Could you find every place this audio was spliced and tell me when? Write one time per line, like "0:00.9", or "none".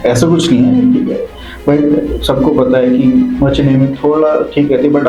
none